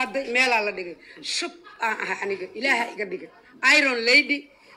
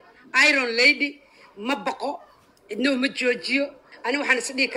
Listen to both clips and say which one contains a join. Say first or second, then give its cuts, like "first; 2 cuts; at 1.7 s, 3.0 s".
second; 1 cut; at 3.9 s